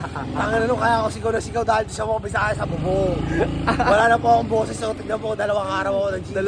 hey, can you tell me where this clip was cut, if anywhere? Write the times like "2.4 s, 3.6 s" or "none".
none